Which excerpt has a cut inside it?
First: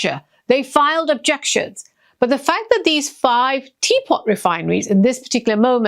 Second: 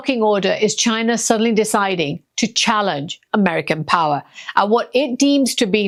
first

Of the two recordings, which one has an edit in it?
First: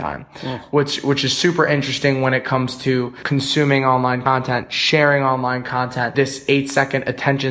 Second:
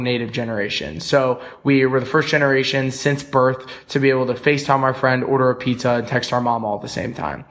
first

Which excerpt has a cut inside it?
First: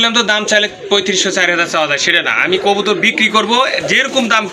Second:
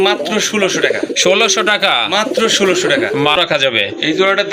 second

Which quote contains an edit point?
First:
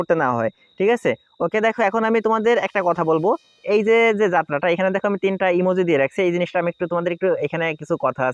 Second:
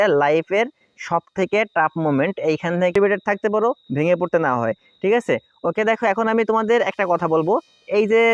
second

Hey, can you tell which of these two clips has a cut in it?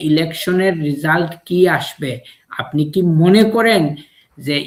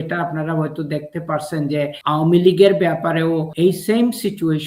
second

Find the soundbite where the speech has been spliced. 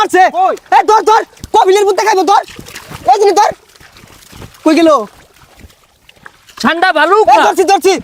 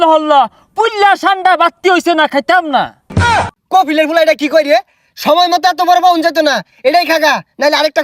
second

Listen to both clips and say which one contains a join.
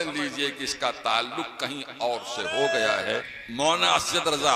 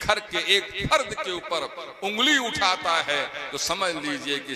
first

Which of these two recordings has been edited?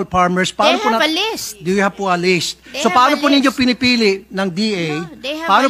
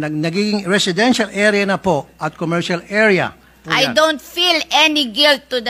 second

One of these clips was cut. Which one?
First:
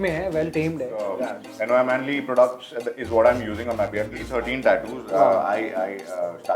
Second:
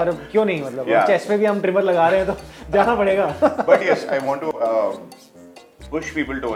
first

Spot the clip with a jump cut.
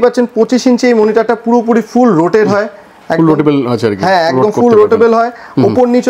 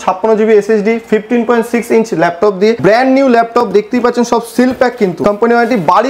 second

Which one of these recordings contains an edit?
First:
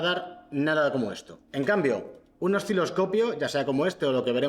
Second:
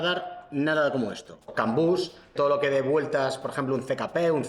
second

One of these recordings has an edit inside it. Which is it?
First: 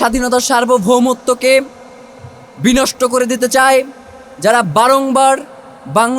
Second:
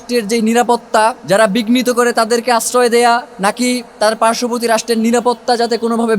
second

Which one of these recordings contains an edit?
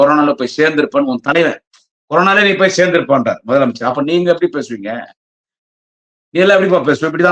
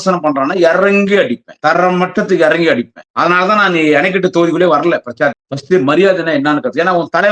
second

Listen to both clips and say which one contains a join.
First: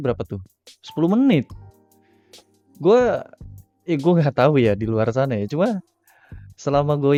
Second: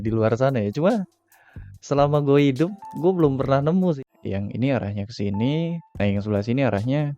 second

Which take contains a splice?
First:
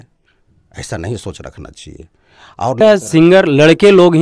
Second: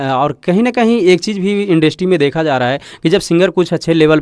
first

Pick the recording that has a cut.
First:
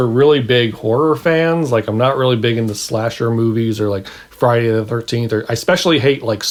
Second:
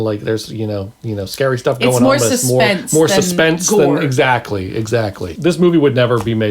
second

